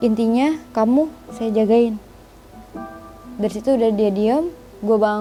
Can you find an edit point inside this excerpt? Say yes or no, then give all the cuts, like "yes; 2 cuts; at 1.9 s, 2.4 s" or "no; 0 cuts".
no; 0 cuts